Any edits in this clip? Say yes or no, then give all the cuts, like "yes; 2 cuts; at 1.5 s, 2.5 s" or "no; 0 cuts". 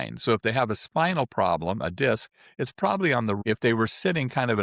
yes; 1 cut; at 3.4 s